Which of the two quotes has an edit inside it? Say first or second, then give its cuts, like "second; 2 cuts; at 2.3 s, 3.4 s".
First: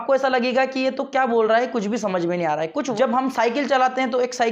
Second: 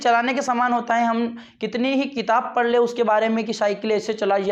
first; 1 cut; at 2.9 s